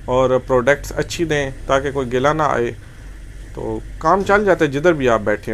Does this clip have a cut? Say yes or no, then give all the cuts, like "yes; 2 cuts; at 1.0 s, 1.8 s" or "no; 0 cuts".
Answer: no; 0 cuts